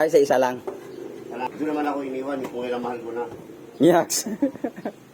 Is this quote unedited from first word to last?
no; 1 cut; at 1.5 s

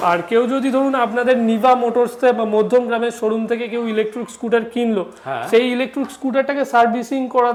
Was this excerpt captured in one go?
yes; 0 cuts

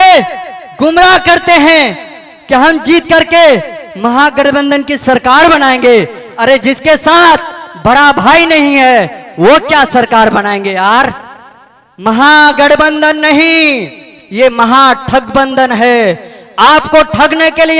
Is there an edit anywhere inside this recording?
no; 0 cuts

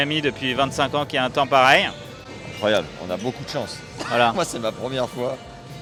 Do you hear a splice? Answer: no; 0 cuts

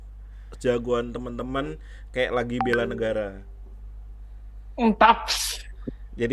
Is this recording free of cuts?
yes; 0 cuts

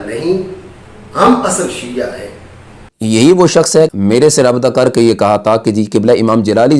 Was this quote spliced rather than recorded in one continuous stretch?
yes; 2 cuts; at 2.9 s, 3.9 s

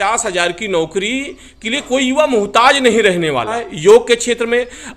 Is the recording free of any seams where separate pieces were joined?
no; 1 cut; at 3.7 s

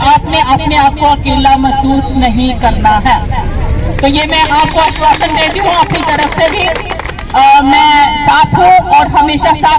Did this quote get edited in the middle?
no; 0 cuts

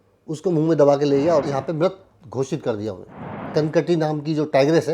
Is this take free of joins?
no; 2 cuts; at 1.5 s, 3.4 s

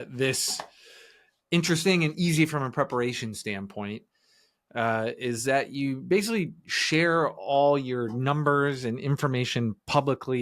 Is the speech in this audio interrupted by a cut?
no; 0 cuts

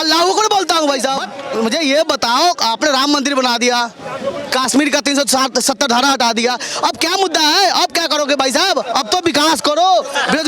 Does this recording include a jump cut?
yes; 1 cut; at 1.4 s

